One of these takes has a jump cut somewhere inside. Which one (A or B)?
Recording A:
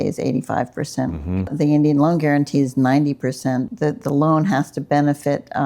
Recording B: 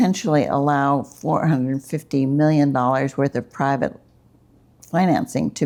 A